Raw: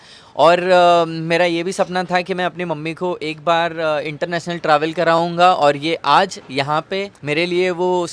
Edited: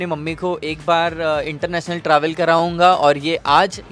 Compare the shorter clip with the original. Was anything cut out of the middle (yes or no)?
no